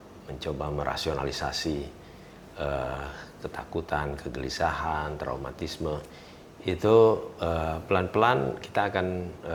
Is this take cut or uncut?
uncut